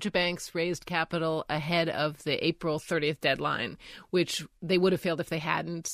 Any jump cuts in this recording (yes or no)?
no